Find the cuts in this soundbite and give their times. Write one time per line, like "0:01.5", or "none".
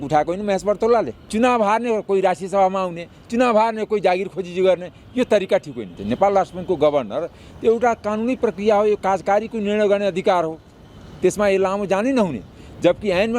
0:01.3
0:05.9